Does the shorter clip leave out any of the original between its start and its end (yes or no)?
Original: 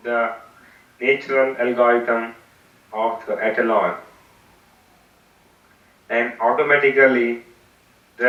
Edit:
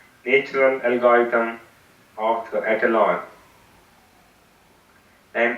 no